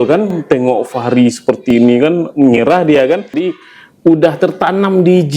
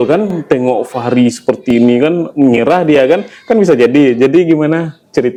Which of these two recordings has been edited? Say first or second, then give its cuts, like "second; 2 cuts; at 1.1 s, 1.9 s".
first; 1 cut; at 3.4 s